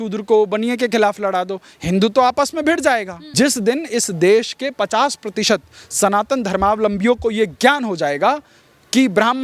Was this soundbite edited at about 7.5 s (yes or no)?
no